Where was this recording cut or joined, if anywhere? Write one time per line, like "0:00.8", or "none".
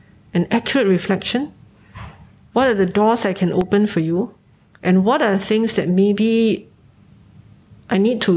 none